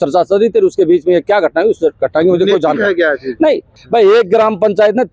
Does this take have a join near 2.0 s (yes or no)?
no